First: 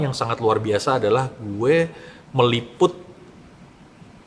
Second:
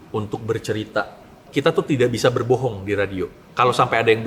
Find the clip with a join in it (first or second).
second